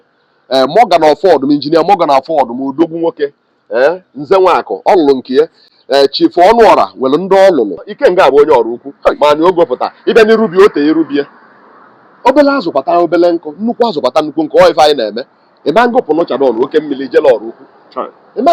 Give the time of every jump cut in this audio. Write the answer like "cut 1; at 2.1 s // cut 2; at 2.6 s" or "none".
cut 1; at 7.9 s